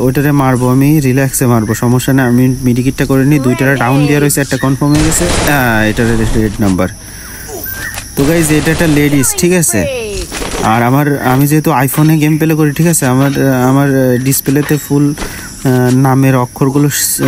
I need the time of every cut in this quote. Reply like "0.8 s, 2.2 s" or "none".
none